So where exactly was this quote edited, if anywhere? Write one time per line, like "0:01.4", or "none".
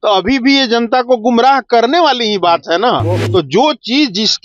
0:03.2